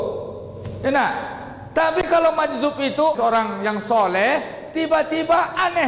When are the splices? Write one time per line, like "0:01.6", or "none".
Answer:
0:03.2